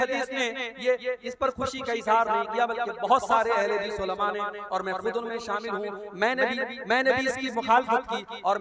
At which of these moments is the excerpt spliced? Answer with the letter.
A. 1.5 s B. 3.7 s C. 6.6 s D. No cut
D